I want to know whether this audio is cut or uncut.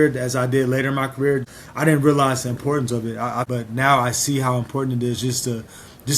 cut